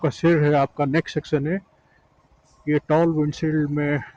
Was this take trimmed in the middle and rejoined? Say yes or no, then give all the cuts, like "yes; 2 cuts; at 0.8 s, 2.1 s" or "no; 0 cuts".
no; 0 cuts